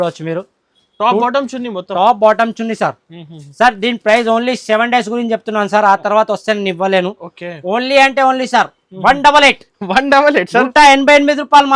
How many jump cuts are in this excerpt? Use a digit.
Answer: 0